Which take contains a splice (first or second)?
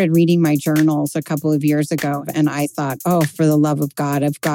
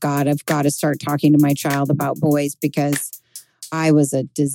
first